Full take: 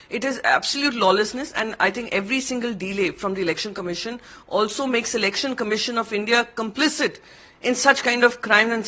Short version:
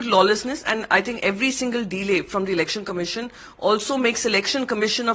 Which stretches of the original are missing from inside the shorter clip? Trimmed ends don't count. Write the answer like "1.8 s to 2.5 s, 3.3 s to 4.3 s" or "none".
none

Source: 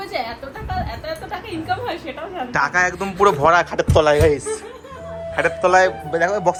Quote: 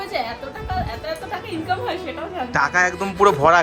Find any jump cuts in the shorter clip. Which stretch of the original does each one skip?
none

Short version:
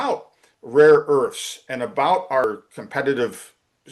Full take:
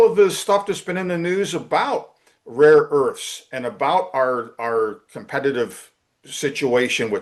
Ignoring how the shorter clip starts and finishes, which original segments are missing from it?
4.3 s to 4.8 s

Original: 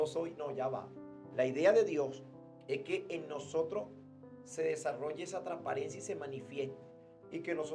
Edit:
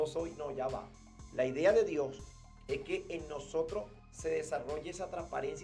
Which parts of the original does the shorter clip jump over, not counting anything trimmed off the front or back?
4.0 s to 4.4 s

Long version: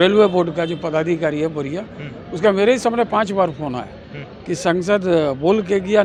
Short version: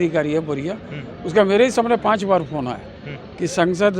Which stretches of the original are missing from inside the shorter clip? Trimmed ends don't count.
none

